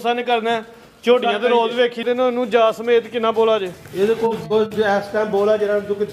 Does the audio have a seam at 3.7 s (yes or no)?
no